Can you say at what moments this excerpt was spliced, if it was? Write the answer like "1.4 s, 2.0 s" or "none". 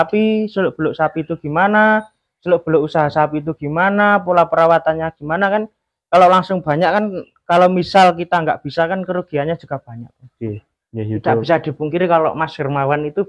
10.6 s